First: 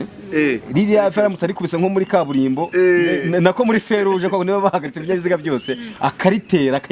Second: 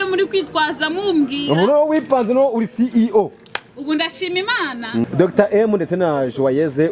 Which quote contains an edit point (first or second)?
second